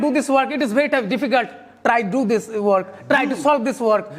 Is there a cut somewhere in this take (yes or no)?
no